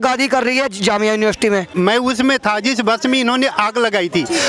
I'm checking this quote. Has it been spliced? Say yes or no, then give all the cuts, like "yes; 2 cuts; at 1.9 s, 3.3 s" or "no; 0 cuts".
yes; 1 cut; at 1.7 s